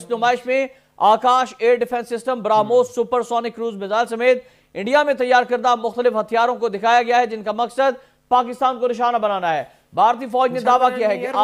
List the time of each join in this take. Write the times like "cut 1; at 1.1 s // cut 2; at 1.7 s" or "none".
none